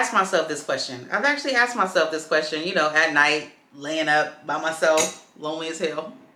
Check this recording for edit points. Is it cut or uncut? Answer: uncut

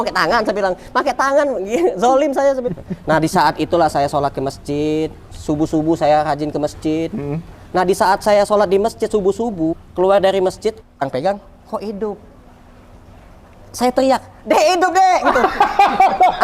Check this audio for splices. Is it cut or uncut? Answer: cut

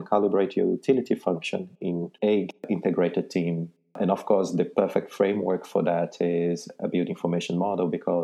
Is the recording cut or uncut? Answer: cut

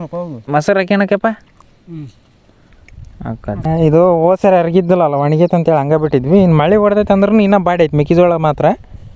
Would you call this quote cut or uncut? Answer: cut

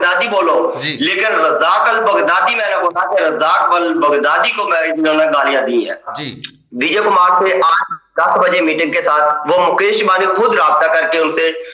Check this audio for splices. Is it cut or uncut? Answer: cut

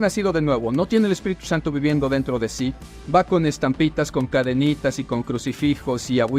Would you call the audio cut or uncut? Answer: cut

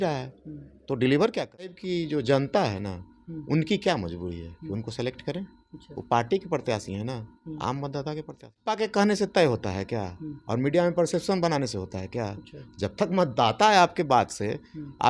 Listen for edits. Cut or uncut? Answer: cut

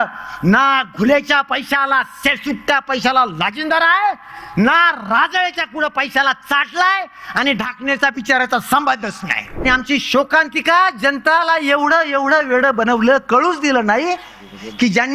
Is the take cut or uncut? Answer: cut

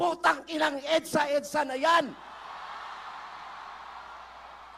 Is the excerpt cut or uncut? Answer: uncut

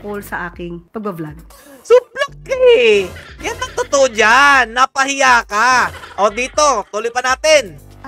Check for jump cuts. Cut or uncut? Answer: uncut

